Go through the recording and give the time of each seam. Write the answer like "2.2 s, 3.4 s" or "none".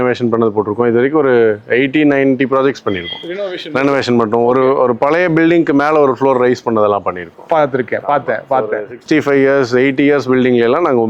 none